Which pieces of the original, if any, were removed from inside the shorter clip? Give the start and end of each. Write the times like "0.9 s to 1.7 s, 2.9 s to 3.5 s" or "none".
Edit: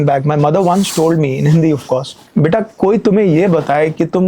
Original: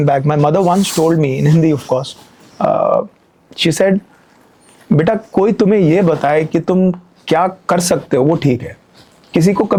2.2 s to 4.7 s